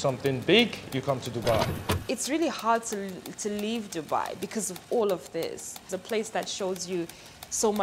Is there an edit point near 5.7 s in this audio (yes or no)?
yes